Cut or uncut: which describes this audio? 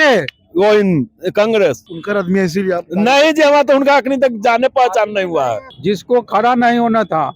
cut